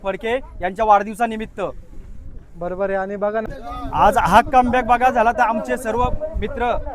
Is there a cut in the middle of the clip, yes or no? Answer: yes